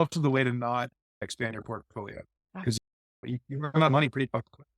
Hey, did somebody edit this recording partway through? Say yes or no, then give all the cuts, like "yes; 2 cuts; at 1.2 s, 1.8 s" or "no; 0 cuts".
yes; 1 cut; at 1.3 s